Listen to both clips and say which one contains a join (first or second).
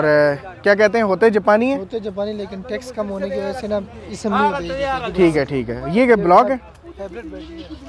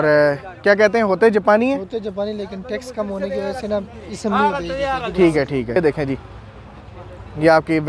second